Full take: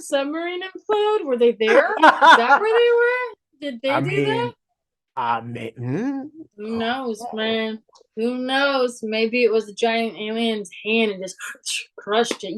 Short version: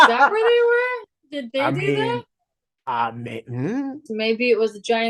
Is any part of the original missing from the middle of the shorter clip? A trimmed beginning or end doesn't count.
yes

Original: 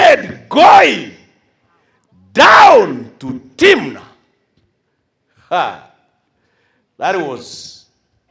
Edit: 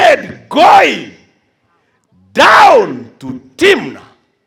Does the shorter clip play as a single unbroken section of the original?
yes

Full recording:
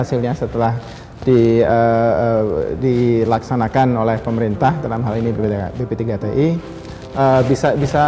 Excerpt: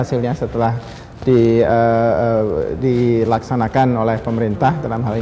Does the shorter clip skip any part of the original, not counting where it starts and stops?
no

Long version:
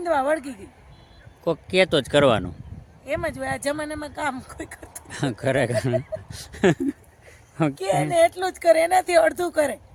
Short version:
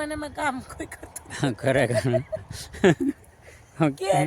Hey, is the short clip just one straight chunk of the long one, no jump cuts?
yes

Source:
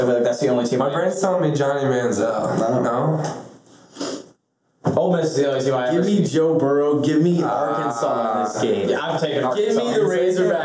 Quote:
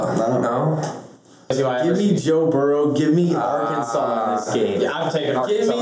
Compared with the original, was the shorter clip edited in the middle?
yes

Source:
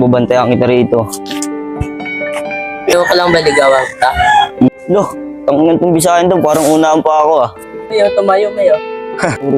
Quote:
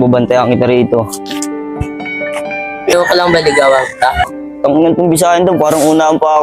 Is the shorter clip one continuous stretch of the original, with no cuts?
no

